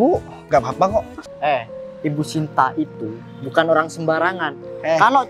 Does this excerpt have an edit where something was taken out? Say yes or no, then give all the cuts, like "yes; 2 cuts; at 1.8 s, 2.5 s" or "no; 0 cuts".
yes; 1 cut; at 1.2 s